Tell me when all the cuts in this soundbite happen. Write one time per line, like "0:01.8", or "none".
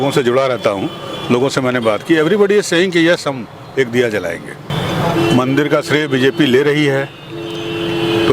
0:04.7